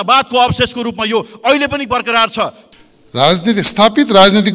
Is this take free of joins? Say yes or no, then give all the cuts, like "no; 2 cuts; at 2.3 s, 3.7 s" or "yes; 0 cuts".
no; 1 cut; at 2.6 s